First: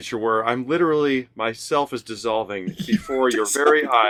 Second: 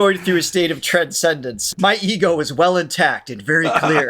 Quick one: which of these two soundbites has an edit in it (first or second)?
second